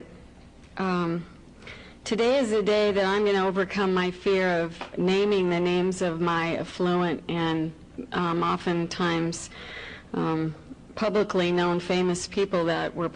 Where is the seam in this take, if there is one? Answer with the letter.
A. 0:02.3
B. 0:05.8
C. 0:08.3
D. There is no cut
C